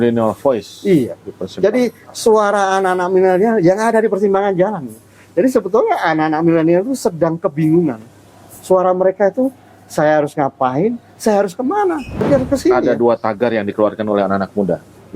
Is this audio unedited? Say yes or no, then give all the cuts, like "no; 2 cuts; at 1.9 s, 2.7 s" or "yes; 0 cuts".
no; 1 cut; at 12.2 s